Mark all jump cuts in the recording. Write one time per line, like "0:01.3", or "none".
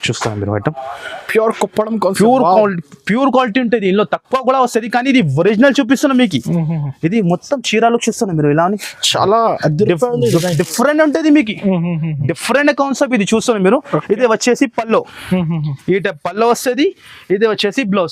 none